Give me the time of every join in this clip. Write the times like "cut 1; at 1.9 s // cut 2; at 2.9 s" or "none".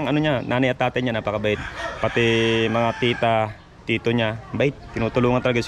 none